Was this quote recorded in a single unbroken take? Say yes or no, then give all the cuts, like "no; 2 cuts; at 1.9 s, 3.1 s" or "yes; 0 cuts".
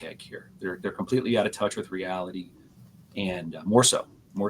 yes; 0 cuts